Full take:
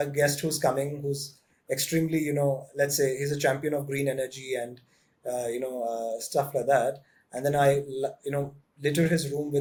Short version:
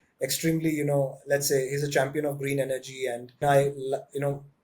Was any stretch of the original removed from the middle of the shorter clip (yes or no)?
yes